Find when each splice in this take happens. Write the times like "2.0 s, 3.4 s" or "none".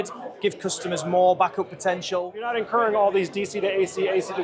2.4 s